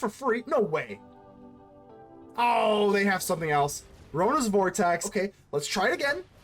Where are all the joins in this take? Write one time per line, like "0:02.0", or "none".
0:05.1